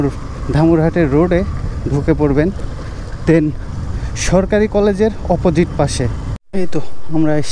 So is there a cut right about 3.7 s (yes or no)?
no